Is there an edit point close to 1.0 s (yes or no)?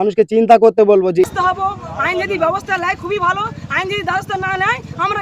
yes